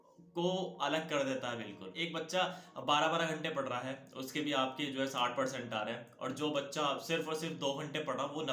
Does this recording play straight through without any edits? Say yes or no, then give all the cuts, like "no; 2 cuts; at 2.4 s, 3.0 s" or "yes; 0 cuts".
no; 1 cut; at 2.0 s